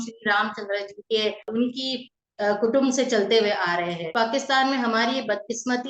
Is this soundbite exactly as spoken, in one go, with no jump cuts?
no; 2 cuts; at 1.5 s, 4.1 s

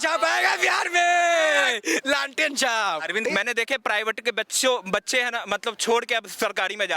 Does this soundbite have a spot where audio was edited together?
yes; 1 cut; at 3.2 s

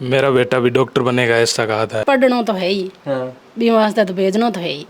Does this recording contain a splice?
yes; 1 cut; at 2.0 s

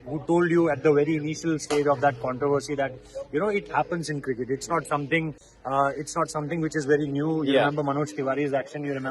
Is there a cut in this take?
no; 0 cuts

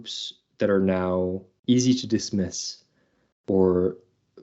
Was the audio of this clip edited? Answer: yes; 1 cut; at 1.5 s

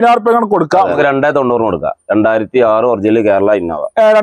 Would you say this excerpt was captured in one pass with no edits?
no; 1 cut; at 0.9 s

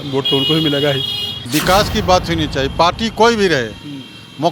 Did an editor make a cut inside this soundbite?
yes; 1 cut; at 1.5 s

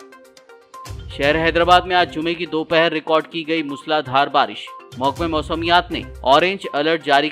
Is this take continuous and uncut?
yes; 0 cuts

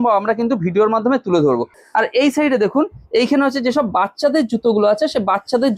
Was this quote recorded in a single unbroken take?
no; 1 cut; at 1.8 s

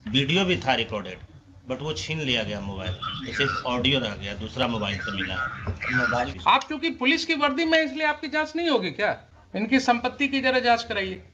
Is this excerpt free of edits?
no; 2 cuts; at 6.3 s, 9.3 s

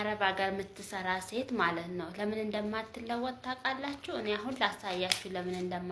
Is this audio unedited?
yes; 0 cuts

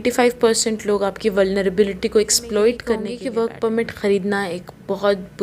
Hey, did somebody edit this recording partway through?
yes; 1 cut; at 3.2 s

